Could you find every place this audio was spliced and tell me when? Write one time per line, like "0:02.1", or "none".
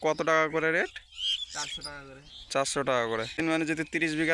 0:03.4